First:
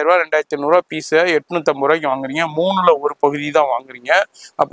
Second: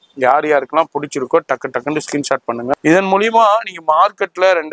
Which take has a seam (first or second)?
second